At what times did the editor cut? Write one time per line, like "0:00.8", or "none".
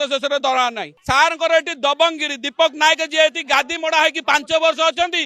0:01.0